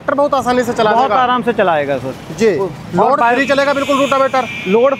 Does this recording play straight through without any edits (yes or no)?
yes